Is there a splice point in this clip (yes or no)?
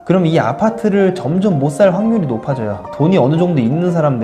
yes